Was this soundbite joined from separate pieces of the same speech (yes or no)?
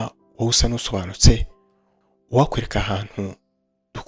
no